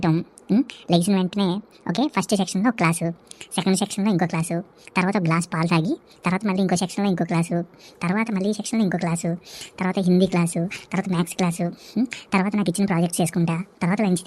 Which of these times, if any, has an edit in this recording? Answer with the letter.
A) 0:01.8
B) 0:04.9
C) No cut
C